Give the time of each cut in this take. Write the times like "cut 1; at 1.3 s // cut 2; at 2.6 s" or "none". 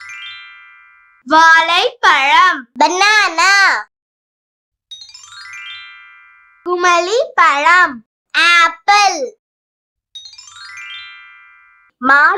none

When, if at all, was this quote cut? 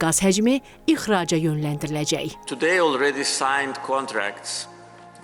cut 1; at 2.4 s

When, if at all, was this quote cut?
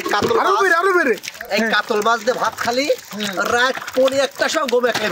cut 1; at 1.4 s

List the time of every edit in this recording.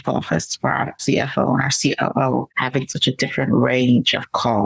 cut 1; at 1.0 s // cut 2; at 2.6 s

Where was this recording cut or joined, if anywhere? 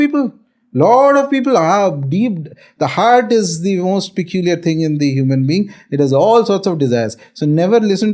none

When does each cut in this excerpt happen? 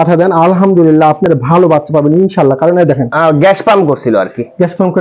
cut 1; at 3.1 s

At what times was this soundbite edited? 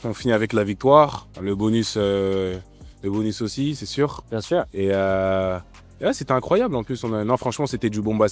none

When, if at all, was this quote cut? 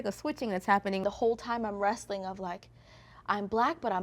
cut 1; at 1.0 s

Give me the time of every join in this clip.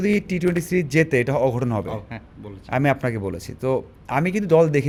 none

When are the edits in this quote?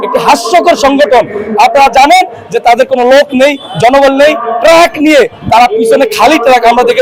none

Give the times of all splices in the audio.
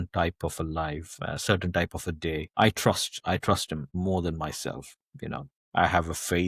cut 1; at 3.9 s // cut 2; at 5.6 s

